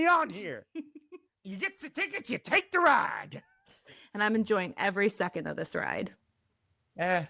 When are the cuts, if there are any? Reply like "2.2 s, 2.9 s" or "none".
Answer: 1.4 s